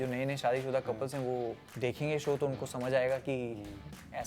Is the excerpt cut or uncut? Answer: cut